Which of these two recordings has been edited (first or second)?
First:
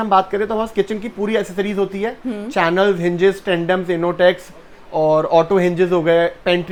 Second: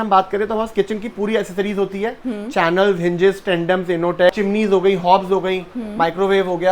second